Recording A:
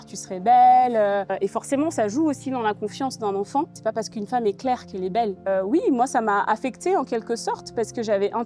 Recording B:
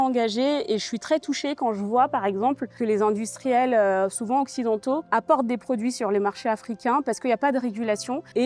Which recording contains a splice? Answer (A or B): A